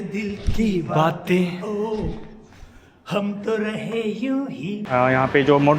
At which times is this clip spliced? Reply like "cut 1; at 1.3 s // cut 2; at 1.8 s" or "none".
cut 1; at 4.8 s

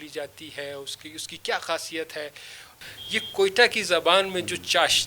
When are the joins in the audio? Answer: cut 1; at 2.7 s

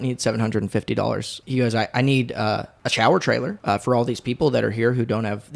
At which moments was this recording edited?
cut 1; at 1.4 s // cut 2; at 2.8 s // cut 3; at 3.5 s

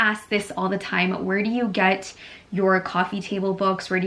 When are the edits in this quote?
none

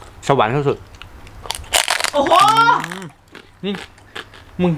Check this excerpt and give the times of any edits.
none

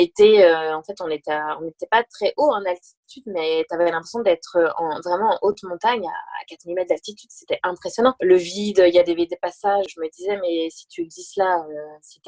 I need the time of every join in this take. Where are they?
cut 1; at 8.2 s // cut 2; at 9.9 s

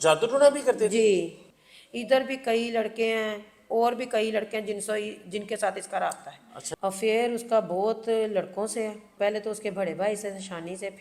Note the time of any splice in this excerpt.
cut 1; at 1.4 s // cut 2; at 6.6 s // cut 3; at 9.1 s

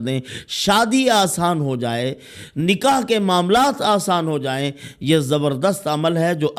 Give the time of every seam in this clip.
none

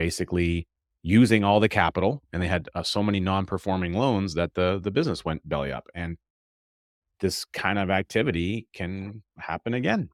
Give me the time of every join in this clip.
none

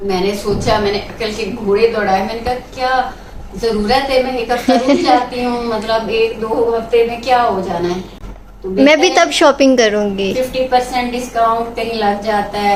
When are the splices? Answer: none

